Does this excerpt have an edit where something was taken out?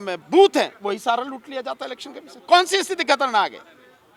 no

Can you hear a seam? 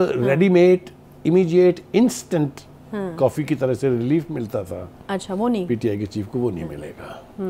no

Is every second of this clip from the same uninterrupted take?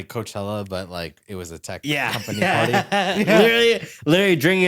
yes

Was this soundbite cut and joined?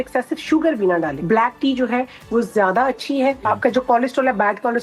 yes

